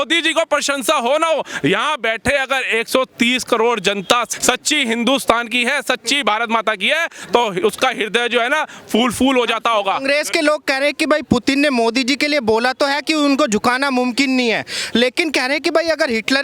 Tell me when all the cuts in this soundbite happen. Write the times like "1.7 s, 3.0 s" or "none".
4.3 s